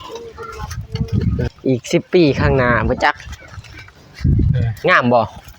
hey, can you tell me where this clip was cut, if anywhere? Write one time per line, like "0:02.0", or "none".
0:01.5